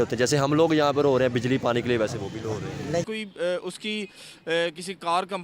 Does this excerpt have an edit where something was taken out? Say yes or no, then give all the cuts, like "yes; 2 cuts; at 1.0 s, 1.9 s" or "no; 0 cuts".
yes; 1 cut; at 3.1 s